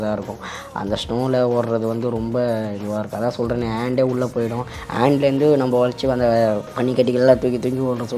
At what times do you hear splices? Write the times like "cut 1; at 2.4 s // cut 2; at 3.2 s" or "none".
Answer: cut 1; at 6.7 s